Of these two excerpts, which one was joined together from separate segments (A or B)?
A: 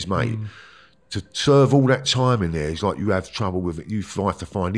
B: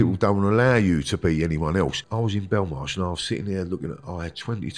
B